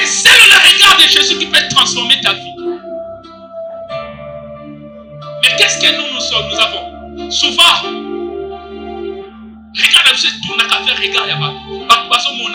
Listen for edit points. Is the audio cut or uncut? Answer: uncut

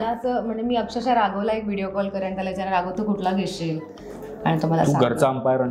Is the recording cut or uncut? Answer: uncut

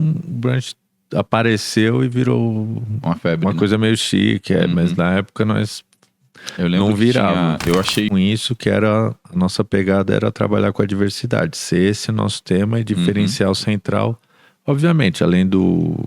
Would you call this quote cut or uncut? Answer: cut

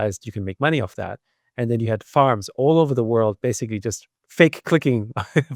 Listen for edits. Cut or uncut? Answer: uncut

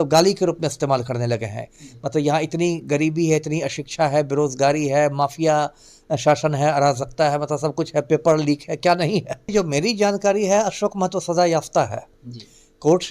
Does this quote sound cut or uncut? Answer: cut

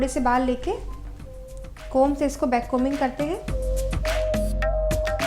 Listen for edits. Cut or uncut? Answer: uncut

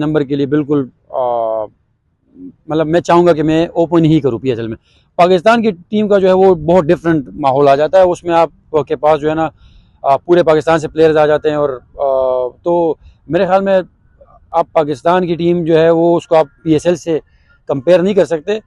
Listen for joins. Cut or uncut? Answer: uncut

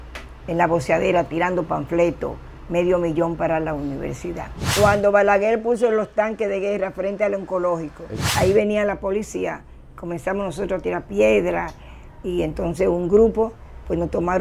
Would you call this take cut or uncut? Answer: cut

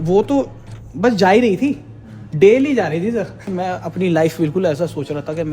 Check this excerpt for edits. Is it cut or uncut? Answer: cut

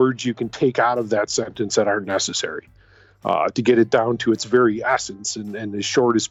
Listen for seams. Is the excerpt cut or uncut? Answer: uncut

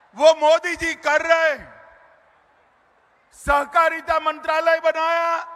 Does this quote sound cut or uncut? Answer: uncut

